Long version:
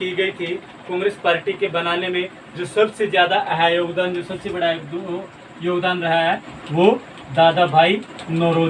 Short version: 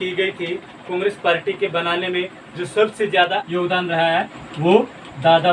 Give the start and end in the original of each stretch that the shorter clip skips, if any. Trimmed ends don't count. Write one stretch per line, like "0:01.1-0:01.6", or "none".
0:03.4-0:05.6